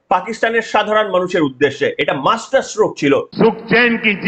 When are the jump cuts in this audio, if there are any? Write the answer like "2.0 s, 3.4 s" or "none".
3.3 s